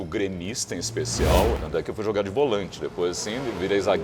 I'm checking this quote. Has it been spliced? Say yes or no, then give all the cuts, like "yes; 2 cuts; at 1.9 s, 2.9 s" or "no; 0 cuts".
yes; 1 cut; at 1.6 s